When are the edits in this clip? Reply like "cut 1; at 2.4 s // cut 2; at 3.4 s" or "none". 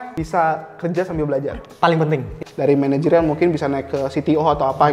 cut 1; at 1.6 s // cut 2; at 2.3 s